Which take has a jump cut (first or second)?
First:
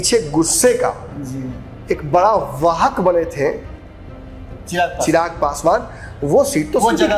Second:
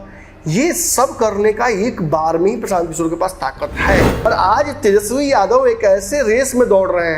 second